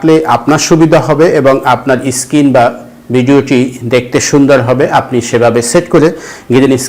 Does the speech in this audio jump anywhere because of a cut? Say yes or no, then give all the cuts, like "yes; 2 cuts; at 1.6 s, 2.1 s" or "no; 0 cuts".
no; 0 cuts